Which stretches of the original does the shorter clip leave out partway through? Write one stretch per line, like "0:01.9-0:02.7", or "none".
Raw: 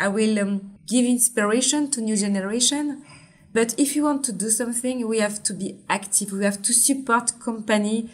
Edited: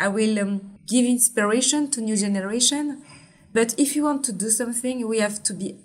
none